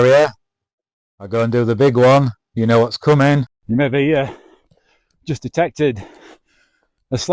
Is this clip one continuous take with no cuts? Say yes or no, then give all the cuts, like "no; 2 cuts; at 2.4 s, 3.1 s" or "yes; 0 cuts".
no; 1 cut; at 3.6 s